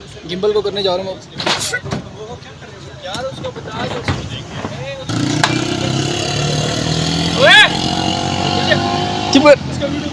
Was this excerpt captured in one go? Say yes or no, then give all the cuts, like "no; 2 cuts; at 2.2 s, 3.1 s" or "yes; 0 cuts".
yes; 0 cuts